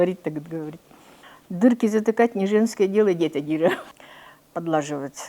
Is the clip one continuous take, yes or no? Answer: no